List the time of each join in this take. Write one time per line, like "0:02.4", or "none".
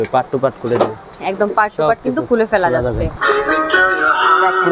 0:01.2
0:03.1

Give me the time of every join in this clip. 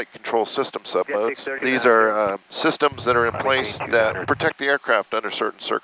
0:01.5
0:04.2

